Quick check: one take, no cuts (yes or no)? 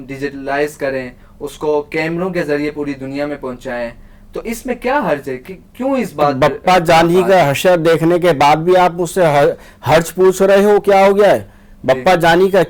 yes